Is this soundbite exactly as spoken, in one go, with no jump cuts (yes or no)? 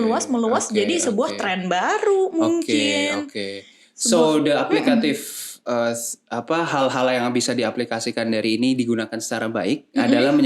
yes